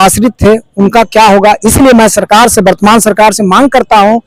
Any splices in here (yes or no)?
no